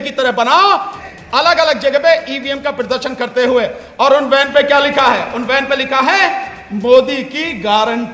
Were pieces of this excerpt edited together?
yes; 1 cut; at 1.0 s

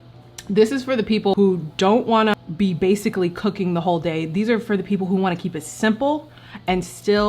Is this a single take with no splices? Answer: no; 2 cuts; at 1.3 s, 2.3 s

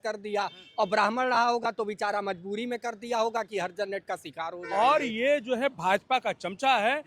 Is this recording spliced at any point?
yes; 1 cut; at 4.5 s

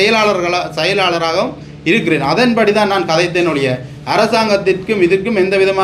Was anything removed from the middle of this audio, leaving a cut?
no; 0 cuts

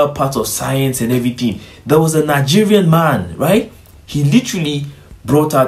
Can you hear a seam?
no; 0 cuts

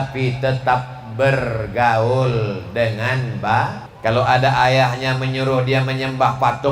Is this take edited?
yes; 1 cut; at 3.9 s

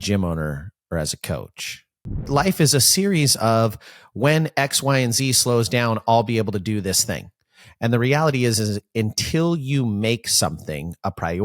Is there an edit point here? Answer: yes; 1 cut; at 2.2 s

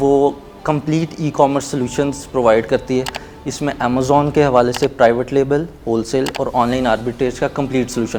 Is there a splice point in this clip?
no; 0 cuts

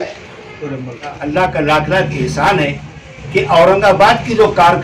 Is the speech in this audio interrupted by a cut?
yes; 1 cut; at 1.1 s

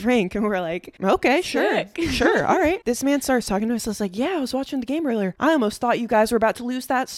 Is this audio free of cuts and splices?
yes; 0 cuts

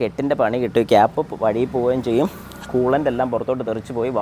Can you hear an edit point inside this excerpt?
no; 0 cuts

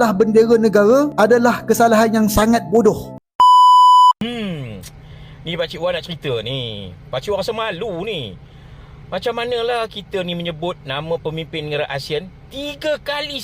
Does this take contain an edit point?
yes; 2 cuts; at 3.1 s, 4.1 s

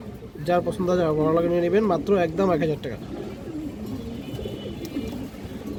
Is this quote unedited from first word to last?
yes; 0 cuts

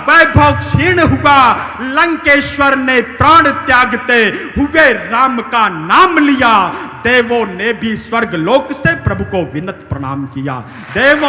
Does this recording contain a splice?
no; 0 cuts

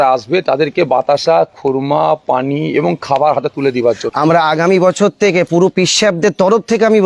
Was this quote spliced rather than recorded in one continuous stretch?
yes; 1 cut; at 4.1 s

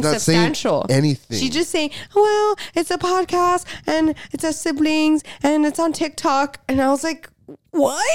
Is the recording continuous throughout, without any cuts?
yes; 0 cuts

